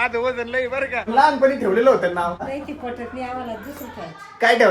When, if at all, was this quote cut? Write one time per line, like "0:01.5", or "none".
0:01.1
0:02.4

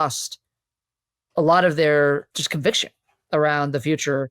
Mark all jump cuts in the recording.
0:02.3

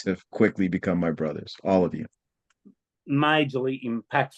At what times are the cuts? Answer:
0:02.6

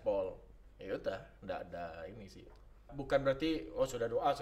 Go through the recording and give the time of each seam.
0:02.9

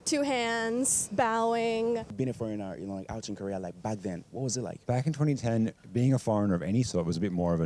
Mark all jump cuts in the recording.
0:01.0
0:02.1
0:04.8

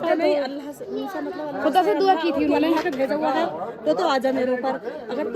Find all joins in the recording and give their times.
none

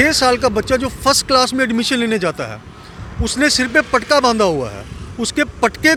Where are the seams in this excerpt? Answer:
none

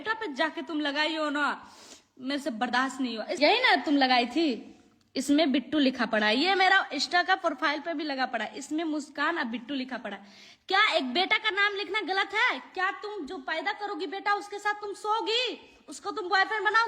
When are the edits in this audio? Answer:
0:03.4

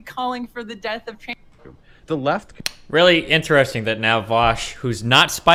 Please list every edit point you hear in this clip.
none

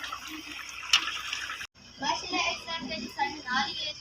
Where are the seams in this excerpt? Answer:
0:01.8

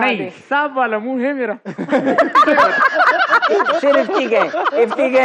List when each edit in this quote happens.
none

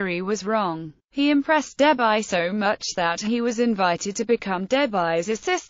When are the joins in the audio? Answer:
none

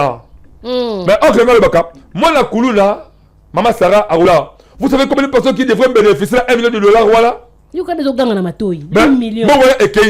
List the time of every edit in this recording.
0:04.3

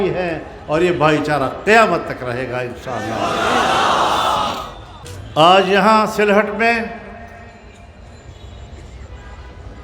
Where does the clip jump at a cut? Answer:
0:05.0

